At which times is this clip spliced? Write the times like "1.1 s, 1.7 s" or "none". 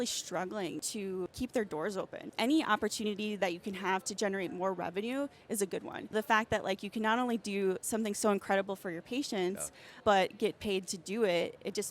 1.0 s, 2.2 s, 6.1 s, 9.9 s